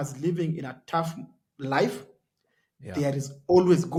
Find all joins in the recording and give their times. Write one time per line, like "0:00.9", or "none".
none